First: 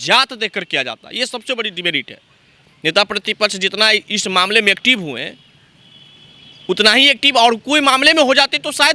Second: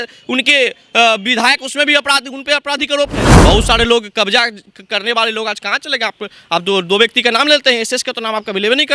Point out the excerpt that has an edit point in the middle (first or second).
second